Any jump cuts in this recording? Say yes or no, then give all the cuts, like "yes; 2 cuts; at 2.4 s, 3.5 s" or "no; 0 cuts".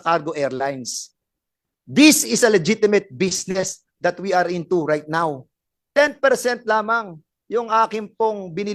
no; 0 cuts